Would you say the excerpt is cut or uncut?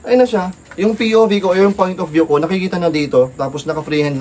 uncut